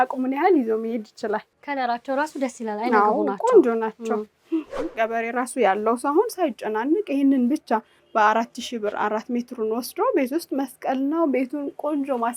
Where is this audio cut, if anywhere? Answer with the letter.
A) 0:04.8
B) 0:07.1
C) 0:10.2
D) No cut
A